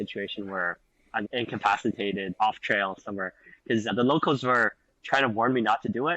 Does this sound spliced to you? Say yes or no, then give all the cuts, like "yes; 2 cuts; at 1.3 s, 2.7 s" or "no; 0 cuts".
yes; 1 cut; at 1.3 s